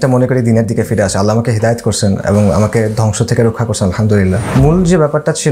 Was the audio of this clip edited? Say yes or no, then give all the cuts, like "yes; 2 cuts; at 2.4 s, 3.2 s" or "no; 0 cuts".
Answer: yes; 1 cut; at 4.4 s